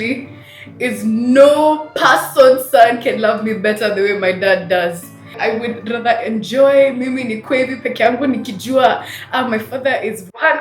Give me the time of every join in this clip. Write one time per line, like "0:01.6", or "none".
0:05.3